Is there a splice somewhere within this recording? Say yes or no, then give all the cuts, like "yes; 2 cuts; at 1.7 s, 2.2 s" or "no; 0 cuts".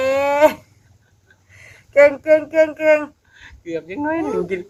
no; 0 cuts